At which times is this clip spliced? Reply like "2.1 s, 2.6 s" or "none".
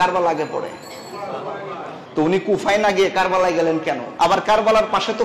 4.1 s